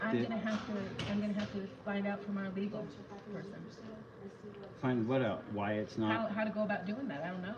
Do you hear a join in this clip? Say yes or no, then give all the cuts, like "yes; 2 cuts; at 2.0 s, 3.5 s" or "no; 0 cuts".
no; 0 cuts